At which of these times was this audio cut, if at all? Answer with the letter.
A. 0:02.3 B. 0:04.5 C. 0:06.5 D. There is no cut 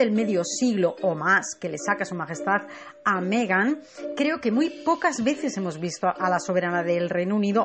A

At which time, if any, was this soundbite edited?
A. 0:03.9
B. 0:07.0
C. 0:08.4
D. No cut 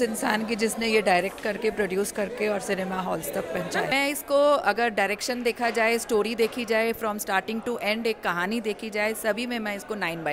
A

